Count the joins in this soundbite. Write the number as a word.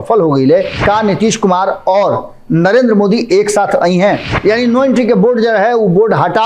two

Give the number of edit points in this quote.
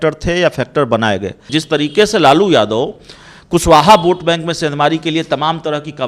one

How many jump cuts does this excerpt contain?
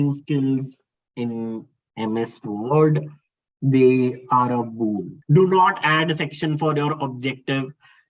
one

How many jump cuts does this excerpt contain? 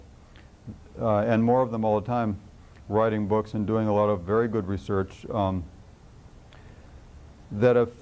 one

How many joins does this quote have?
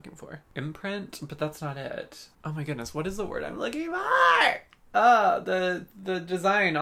zero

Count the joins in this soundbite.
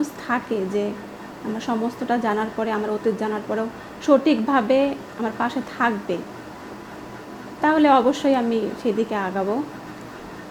zero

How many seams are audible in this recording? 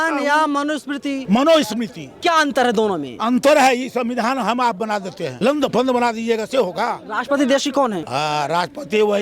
five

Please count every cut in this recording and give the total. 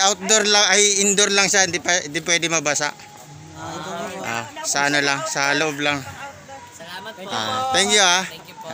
zero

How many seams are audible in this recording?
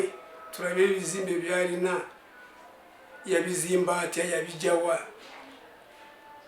zero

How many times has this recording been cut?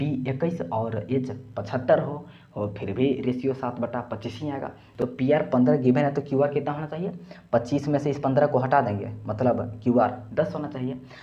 one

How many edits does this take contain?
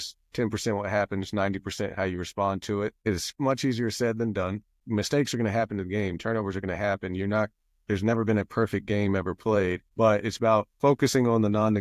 two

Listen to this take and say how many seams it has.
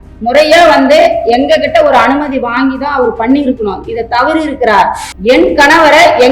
one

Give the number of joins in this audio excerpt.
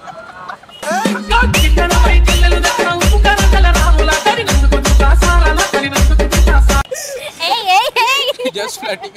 zero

